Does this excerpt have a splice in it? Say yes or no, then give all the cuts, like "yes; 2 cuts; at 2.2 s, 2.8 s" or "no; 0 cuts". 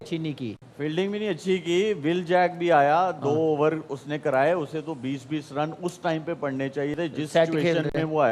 no; 0 cuts